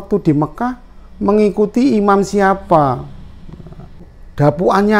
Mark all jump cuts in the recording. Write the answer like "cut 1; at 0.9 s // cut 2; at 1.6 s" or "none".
cut 1; at 4.1 s